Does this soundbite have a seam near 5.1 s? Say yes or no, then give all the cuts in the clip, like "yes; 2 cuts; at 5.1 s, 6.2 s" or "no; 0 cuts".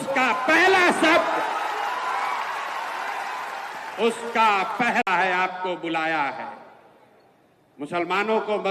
yes; 1 cut; at 5.1 s